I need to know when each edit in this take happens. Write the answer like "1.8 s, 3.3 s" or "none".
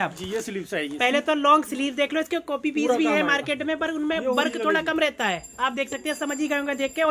none